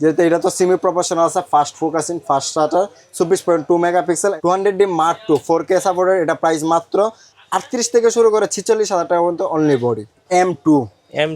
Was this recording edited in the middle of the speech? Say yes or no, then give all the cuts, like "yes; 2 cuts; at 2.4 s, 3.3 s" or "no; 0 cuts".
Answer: yes; 2 cuts; at 4.4 s, 10.3 s